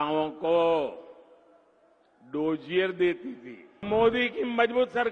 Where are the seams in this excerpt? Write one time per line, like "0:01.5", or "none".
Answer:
0:03.8